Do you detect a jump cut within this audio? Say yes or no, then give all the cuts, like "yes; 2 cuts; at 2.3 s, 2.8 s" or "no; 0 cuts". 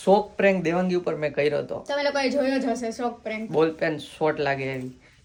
no; 0 cuts